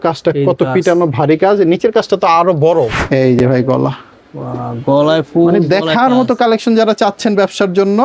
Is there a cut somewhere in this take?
yes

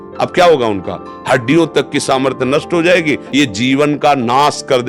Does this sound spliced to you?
yes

